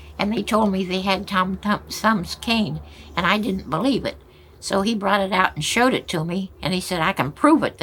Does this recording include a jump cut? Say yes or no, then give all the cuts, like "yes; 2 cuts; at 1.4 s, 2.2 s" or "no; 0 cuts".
no; 0 cuts